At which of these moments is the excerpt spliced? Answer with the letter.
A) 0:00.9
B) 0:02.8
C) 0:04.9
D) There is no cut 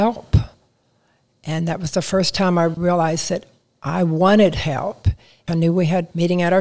B